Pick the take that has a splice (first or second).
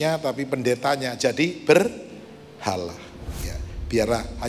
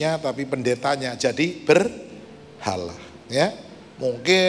first